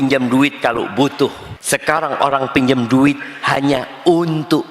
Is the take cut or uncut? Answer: cut